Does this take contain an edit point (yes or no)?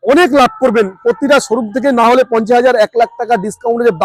no